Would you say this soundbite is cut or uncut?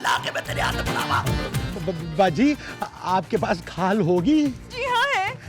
cut